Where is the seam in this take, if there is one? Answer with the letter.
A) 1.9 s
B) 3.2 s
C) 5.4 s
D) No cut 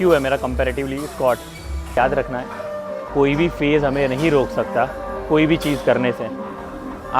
A